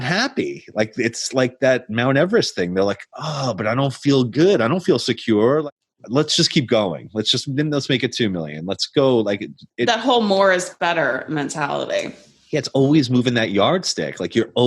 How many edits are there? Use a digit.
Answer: 1